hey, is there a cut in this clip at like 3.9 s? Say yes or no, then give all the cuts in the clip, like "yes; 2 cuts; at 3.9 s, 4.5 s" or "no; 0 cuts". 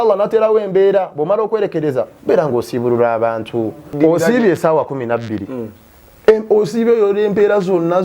yes; 1 cut; at 3.9 s